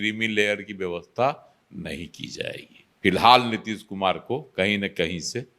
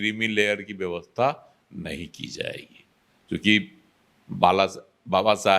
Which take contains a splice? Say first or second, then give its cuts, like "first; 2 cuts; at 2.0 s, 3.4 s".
first; 1 cut; at 2.9 s